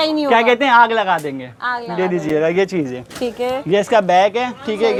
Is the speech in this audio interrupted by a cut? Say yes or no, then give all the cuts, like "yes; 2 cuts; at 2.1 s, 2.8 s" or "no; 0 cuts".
no; 0 cuts